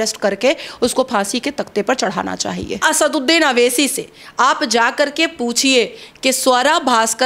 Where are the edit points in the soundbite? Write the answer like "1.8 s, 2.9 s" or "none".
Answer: 2.8 s